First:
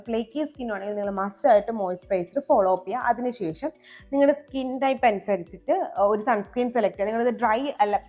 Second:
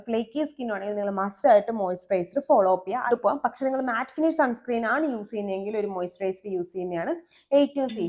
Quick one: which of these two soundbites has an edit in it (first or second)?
second